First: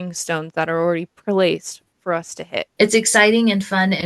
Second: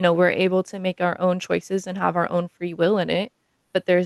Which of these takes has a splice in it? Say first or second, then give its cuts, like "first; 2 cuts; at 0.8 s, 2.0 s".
first; 1 cut; at 2.7 s